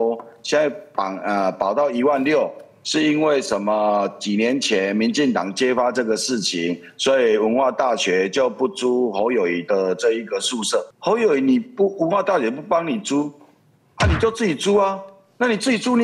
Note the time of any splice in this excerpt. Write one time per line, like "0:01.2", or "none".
0:10.9